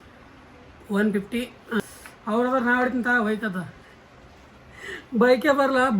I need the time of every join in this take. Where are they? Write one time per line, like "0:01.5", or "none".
0:01.8